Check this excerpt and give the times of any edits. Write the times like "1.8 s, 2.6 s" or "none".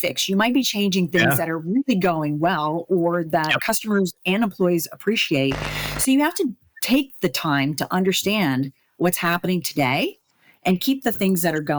none